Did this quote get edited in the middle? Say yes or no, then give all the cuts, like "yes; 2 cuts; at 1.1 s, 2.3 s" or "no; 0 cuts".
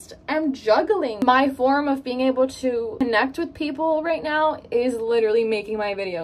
yes; 2 cuts; at 1.2 s, 2.9 s